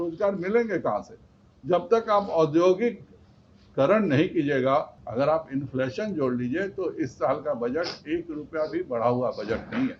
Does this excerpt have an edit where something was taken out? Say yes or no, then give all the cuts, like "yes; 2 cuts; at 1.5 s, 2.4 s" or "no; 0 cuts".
yes; 1 cut; at 5.0 s